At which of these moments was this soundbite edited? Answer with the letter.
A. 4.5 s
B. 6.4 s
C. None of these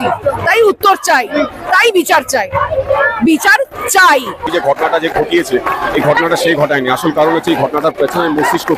A